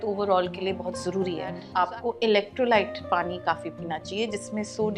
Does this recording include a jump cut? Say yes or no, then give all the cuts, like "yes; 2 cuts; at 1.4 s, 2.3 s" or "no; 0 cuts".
yes; 1 cut; at 1.6 s